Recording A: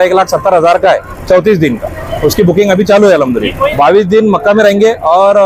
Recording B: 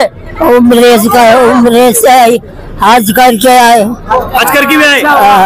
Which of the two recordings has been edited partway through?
A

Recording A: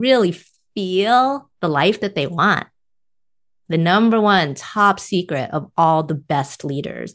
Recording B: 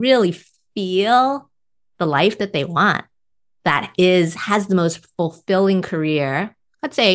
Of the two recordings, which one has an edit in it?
A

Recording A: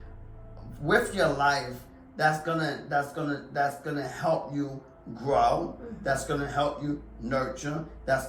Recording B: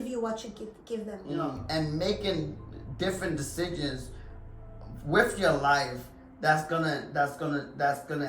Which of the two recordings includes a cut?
B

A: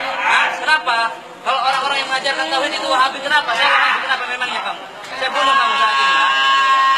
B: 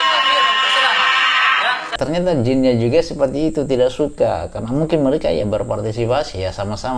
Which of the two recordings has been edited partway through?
B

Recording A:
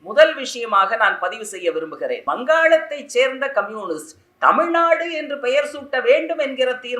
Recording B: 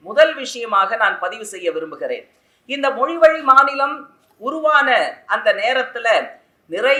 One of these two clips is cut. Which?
A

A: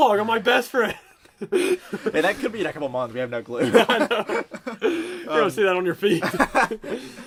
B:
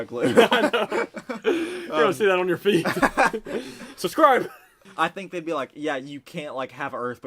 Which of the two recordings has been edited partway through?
B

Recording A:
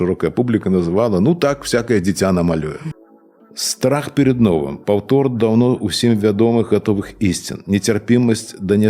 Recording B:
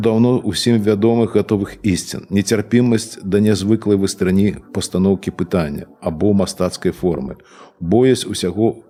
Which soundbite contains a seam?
A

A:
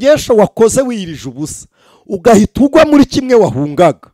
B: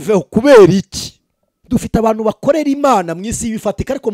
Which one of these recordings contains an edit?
B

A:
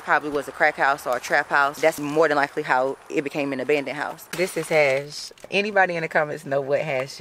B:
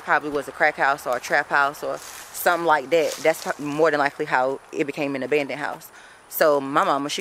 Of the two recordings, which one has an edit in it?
A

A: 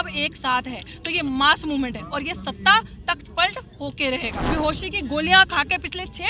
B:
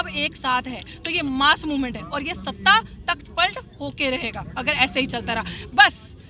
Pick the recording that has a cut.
A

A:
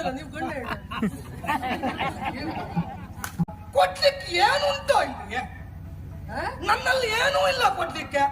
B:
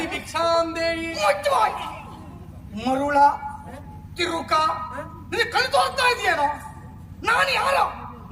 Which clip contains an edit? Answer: A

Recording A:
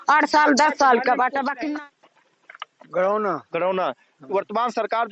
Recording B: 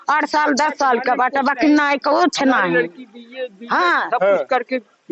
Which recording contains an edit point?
A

